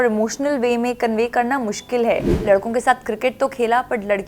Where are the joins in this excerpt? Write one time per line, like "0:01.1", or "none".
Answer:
0:02.3